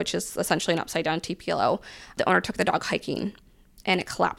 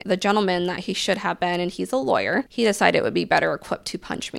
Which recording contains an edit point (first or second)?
second